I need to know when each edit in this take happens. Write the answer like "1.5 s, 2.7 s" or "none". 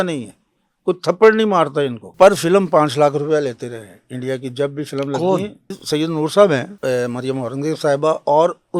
2.1 s, 5.8 s, 6.7 s